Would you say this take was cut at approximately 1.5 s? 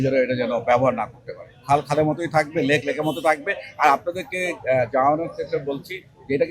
no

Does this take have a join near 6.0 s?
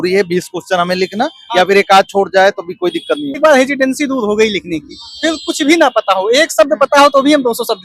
no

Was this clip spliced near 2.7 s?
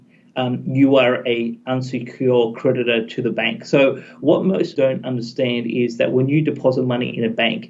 no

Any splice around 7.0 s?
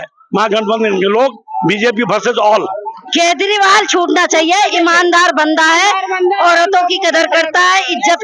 no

